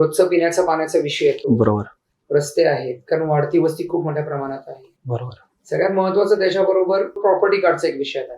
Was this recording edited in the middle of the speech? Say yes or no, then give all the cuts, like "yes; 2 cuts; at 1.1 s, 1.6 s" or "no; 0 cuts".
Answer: yes; 1 cut; at 7.2 s